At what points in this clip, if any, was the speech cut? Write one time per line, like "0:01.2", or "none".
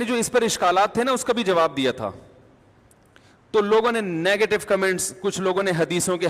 0:01.1